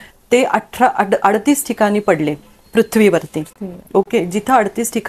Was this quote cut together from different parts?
no; 0 cuts

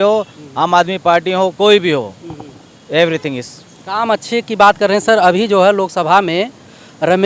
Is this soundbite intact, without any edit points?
yes; 0 cuts

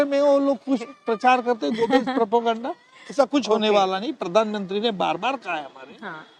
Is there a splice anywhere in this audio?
no; 0 cuts

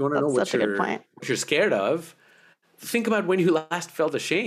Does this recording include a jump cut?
no; 0 cuts

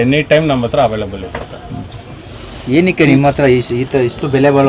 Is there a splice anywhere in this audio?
no; 0 cuts

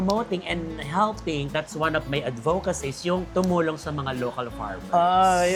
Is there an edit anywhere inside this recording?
no; 0 cuts

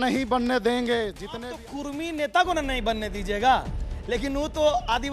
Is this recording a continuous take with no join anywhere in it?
no; 1 cut; at 1.2 s

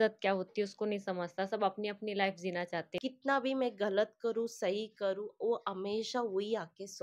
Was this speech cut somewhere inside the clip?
yes; 1 cut; at 2.9 s

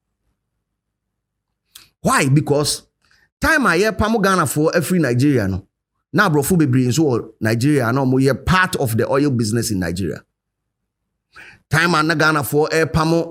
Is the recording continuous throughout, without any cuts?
yes; 0 cuts

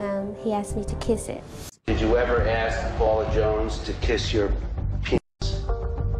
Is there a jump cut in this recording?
no; 0 cuts

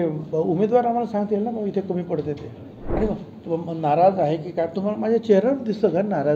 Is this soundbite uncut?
no; 1 cut; at 3.0 s

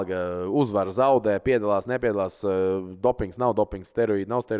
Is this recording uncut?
yes; 0 cuts

